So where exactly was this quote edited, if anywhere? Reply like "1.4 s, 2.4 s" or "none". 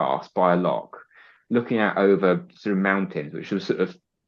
none

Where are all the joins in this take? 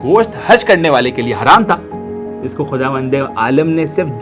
none

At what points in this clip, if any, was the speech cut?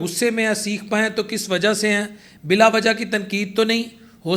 none

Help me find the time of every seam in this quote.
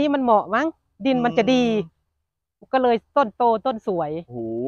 none

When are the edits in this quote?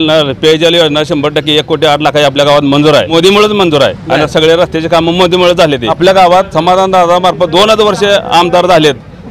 3.1 s, 5.9 s

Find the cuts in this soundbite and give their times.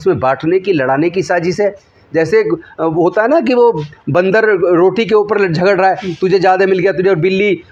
none

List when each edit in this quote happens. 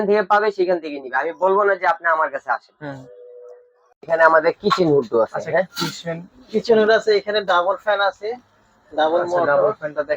none

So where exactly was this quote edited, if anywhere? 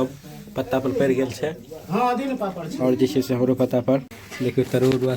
4.2 s

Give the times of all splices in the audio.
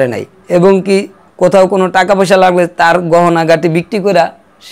1.2 s

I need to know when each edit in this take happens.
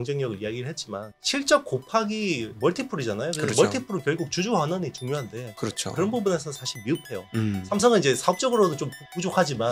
1.1 s

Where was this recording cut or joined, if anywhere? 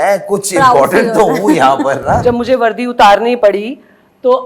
2.2 s, 3.4 s

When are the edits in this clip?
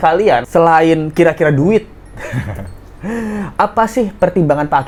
none

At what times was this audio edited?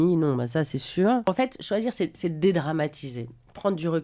1.3 s

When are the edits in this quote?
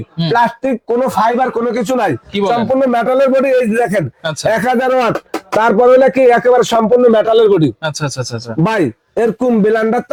none

